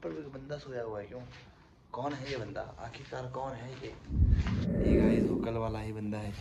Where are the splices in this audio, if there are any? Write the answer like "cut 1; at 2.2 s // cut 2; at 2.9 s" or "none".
cut 1; at 4.0 s // cut 2; at 5.4 s